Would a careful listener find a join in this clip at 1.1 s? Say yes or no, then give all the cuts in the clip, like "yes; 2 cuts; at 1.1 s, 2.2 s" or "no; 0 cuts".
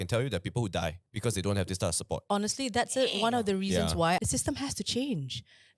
yes; 3 cuts; at 1.1 s, 2.2 s, 4.2 s